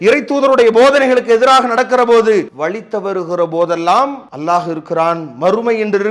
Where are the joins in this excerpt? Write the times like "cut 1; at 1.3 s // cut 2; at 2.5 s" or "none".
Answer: cut 1; at 2.5 s // cut 2; at 4.3 s